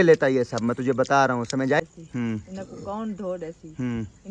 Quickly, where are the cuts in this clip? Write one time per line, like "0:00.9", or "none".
0:01.8

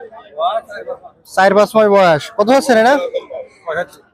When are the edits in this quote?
none

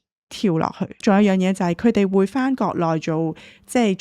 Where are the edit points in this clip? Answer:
0:01.0

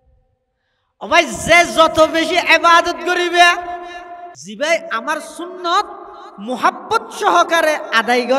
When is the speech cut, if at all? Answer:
0:04.3

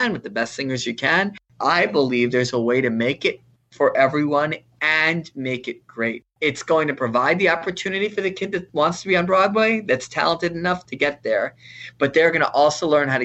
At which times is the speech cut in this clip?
0:01.4
0:06.3

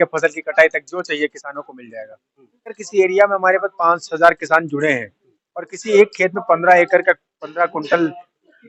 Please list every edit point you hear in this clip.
0:02.8

